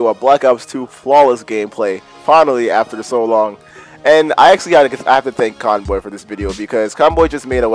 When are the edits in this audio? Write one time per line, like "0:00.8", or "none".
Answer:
none

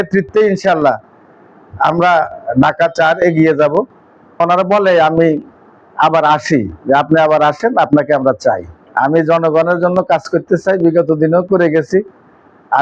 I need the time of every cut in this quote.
0:04.4
0:08.8

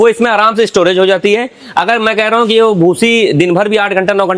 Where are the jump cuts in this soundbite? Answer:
none

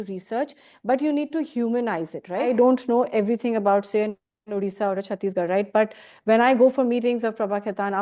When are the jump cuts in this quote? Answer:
0:02.5

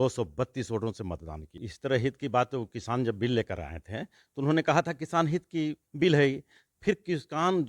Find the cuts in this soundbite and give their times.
0:01.7

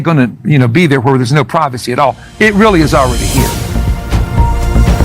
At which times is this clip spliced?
0:03.1

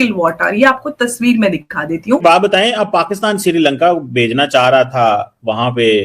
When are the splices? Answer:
0:02.2

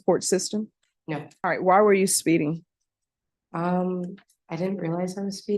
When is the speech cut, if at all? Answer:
0:01.3

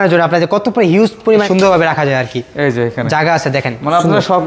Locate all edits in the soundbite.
0:01.5

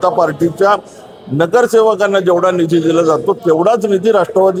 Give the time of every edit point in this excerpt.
none

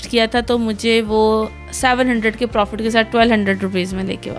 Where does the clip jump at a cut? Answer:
none

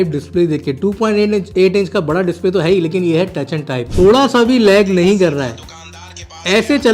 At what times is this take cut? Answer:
0:03.9

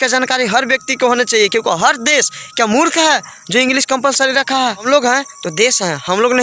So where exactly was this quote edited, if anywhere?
0:04.8

